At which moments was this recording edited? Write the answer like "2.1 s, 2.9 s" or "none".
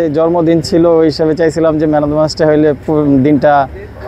none